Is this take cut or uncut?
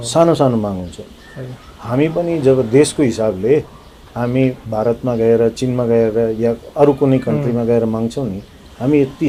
uncut